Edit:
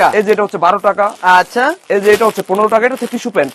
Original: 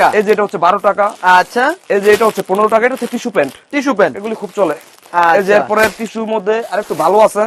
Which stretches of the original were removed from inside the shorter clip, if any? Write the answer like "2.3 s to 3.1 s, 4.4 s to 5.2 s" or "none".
none